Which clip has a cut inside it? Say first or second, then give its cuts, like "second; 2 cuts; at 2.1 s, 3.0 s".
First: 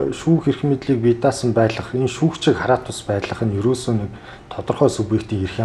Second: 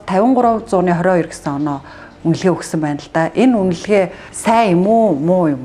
second; 1 cut; at 4.3 s